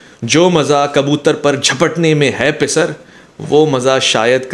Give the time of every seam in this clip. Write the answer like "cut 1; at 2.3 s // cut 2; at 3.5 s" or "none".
none